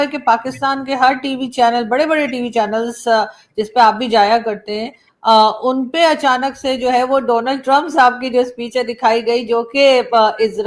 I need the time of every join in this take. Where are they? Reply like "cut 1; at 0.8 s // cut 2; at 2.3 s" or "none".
none

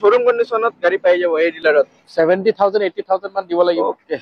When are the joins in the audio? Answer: cut 1; at 1.6 s

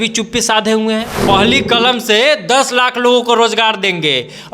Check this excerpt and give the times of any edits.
cut 1; at 1.1 s

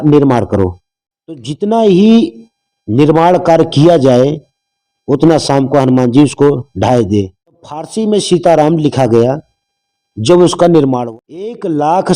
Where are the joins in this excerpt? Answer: cut 1; at 1.5 s // cut 2; at 7.6 s // cut 3; at 11.0 s

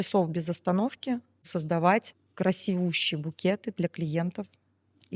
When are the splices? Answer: cut 1; at 1.5 s // cut 2; at 2.2 s

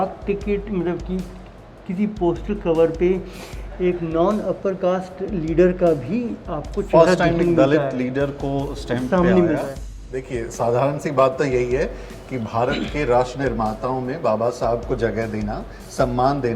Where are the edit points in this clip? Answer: cut 1; at 9.8 s

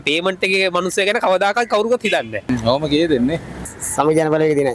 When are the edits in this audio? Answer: cut 1; at 2.5 s // cut 2; at 3.6 s

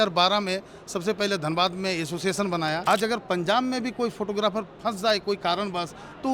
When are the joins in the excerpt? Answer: cut 1; at 2.8 s

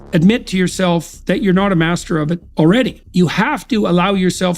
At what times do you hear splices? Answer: cut 1; at 3.0 s

